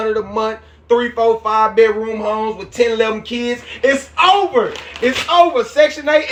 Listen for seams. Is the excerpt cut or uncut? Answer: uncut